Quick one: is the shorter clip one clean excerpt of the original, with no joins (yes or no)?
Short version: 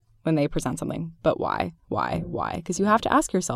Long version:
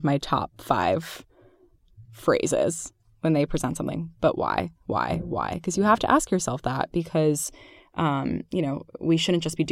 yes